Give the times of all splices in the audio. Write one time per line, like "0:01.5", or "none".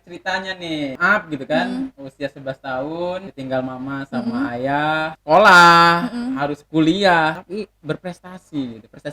0:01.0
0:03.3
0:05.2
0:07.4